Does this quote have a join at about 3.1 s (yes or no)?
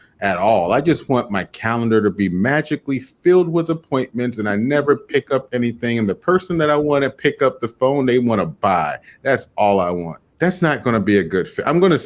no